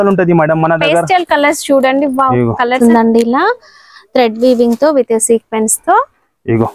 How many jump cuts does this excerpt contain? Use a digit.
1